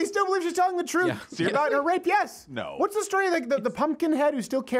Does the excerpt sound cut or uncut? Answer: uncut